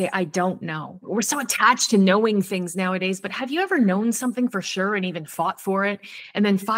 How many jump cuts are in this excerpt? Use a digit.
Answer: 1